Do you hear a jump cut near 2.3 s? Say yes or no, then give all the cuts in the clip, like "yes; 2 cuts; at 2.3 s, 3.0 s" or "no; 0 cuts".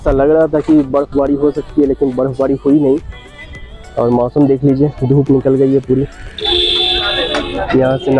no; 1 cut; at 7.0 s